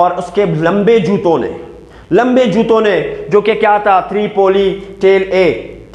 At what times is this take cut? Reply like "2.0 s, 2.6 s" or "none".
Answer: none